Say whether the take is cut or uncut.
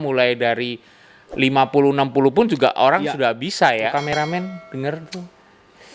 cut